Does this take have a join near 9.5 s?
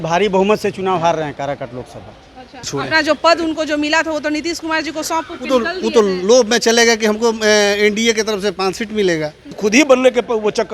yes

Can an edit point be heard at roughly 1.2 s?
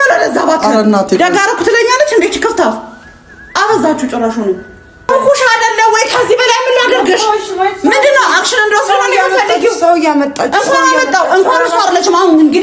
no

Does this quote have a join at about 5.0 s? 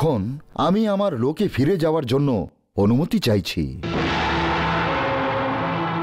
no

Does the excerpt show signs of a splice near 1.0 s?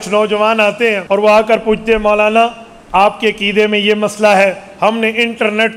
yes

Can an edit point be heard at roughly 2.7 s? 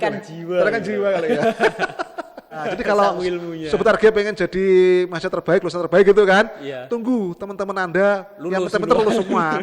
yes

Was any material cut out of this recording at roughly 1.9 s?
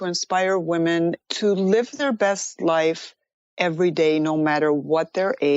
yes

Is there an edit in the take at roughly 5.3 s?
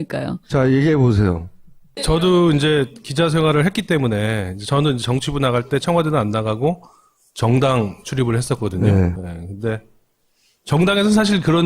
no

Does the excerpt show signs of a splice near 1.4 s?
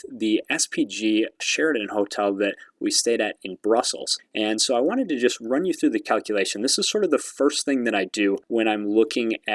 yes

